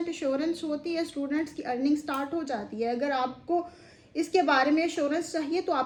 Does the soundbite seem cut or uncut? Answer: uncut